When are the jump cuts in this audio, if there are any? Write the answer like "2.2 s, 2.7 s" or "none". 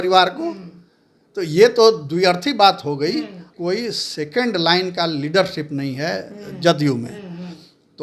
3.5 s